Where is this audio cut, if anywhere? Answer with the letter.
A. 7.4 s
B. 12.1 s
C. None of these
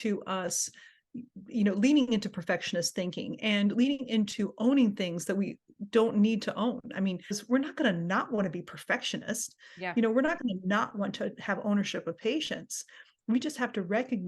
A